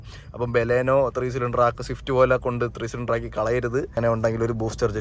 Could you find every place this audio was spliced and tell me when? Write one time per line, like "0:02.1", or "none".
0:03.9